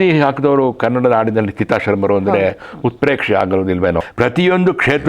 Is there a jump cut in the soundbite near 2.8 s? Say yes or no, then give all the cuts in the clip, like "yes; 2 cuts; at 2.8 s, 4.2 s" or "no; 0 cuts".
no; 1 cut; at 4.1 s